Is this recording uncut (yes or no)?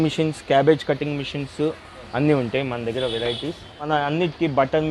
no